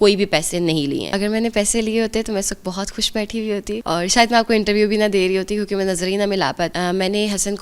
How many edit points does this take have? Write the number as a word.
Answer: three